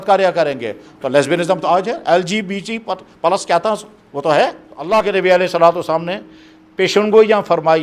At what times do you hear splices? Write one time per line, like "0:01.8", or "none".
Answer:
0:04.7